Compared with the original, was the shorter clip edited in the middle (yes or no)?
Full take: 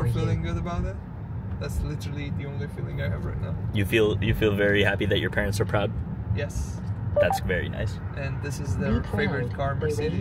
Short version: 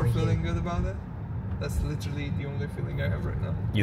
no